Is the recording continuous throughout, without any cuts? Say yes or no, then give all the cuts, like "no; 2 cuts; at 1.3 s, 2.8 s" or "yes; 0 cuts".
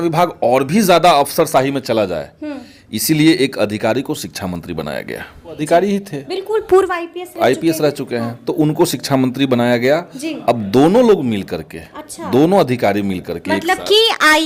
yes; 0 cuts